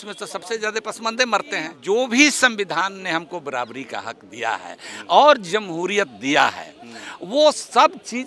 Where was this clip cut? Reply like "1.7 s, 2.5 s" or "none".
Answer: 1.7 s